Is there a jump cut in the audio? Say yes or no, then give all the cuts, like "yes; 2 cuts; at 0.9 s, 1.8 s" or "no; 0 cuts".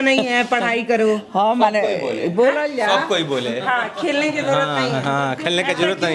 no; 0 cuts